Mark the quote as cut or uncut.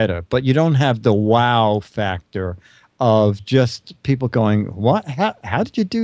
uncut